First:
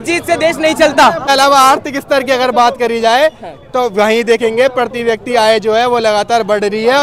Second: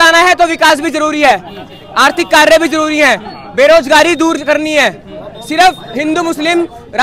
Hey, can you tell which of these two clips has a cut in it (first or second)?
first